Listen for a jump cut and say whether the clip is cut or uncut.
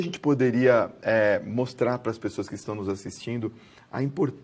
cut